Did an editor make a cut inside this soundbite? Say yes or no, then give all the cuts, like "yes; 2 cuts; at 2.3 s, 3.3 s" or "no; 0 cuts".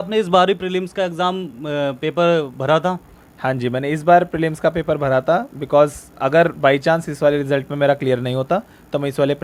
no; 0 cuts